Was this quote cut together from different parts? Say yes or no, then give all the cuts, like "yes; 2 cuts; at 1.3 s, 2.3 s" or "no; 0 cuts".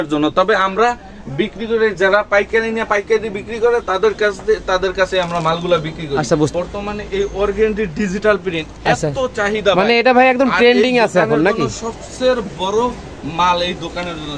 yes; 1 cut; at 6.5 s